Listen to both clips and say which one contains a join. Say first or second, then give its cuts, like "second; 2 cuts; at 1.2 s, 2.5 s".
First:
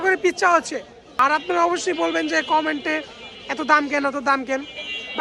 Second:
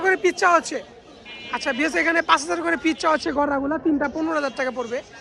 first; 1 cut; at 1.0 s